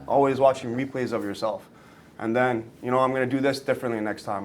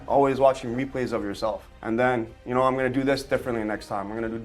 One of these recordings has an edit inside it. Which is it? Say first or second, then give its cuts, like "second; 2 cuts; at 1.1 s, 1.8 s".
second; 1 cut; at 1.7 s